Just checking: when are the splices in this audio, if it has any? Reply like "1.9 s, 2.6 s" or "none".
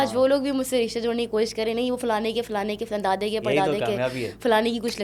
none